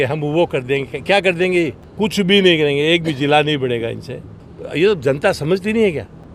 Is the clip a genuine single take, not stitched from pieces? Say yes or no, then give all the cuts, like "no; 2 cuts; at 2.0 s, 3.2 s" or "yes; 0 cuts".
yes; 0 cuts